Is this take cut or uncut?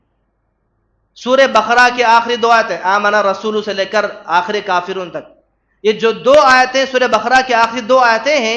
uncut